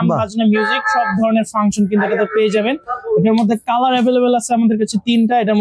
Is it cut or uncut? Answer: uncut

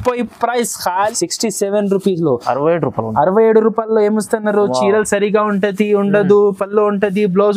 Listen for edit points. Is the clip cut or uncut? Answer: cut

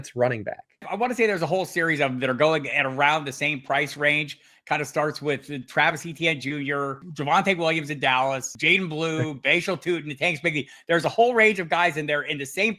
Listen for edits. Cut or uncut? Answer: cut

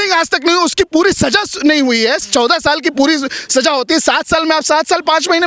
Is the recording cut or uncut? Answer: uncut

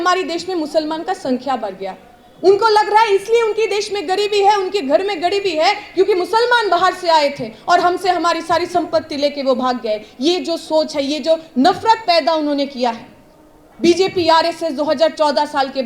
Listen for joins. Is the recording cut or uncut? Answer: uncut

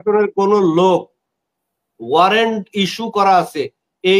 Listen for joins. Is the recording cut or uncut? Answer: uncut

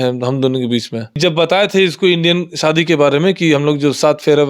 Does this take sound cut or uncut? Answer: cut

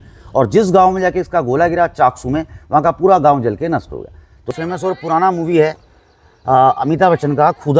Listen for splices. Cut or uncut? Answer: cut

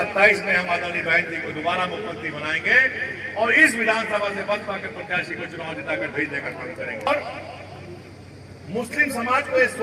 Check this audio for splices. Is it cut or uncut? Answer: cut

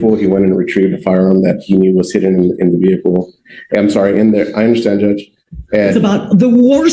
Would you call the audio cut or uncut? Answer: uncut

